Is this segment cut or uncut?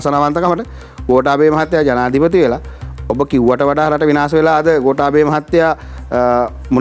uncut